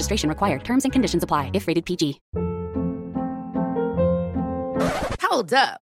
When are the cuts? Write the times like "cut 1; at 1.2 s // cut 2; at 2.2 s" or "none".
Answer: cut 1; at 2.2 s